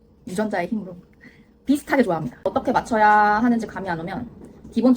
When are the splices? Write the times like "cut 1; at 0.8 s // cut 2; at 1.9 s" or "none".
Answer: cut 1; at 2.3 s

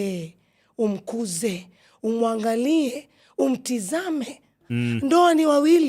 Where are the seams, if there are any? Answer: cut 1; at 4.6 s

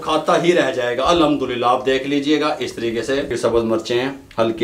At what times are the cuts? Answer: cut 1; at 3.3 s

